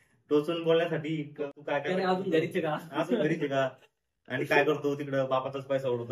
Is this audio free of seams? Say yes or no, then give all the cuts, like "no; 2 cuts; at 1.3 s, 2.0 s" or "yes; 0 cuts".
no; 1 cut; at 1.5 s